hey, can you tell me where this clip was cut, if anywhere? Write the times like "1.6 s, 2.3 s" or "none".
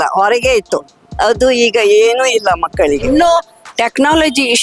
3.0 s